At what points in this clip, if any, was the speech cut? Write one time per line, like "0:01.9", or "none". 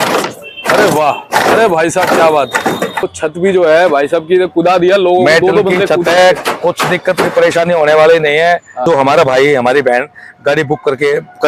0:03.1
0:08.8